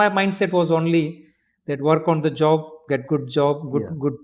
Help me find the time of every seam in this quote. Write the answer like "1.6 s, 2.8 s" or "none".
none